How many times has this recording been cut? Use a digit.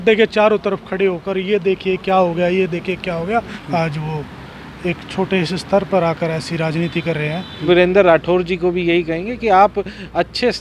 2